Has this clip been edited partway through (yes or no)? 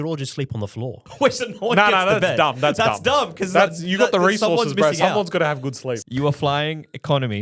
yes